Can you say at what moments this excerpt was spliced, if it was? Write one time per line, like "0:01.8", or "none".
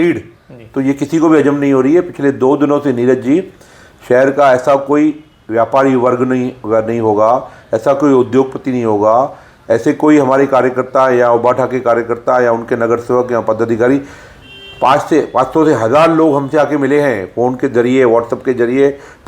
none